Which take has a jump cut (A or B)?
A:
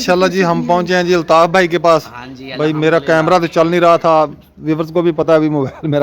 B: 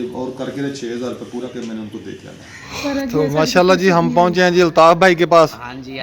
B